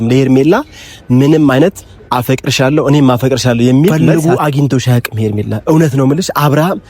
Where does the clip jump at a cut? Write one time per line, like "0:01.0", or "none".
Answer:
0:03.9